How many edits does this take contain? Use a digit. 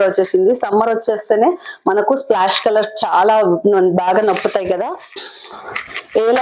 1